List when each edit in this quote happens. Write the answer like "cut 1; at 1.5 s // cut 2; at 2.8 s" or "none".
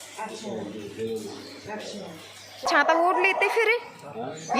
cut 1; at 2.8 s